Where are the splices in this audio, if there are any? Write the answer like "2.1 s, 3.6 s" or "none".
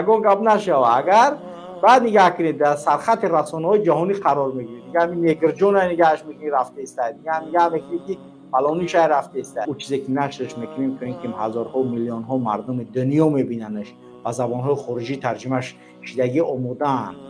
9.6 s